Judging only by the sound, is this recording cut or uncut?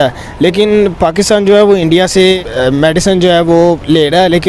uncut